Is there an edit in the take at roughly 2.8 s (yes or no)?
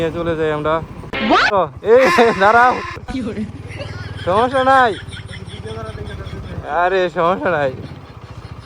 no